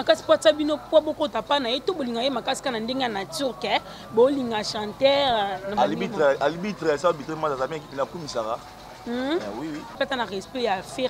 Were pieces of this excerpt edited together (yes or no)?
yes